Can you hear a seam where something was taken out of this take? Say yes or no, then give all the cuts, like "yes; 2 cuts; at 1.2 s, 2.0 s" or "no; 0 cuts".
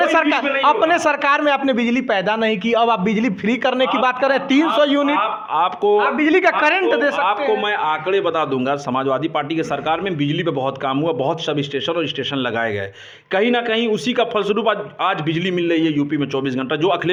no; 0 cuts